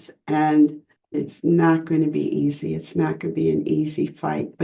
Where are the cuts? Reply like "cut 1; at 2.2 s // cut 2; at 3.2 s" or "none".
cut 1; at 1.1 s